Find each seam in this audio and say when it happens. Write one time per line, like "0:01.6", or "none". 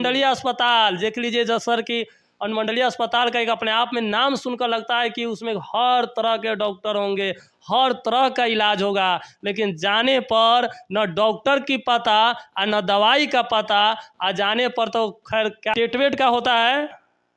none